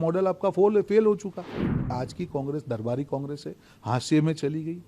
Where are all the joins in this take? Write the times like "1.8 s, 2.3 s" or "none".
1.9 s